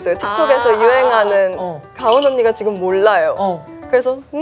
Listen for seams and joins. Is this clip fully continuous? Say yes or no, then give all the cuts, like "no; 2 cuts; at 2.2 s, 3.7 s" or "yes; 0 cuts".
no; 1 cut; at 1.9 s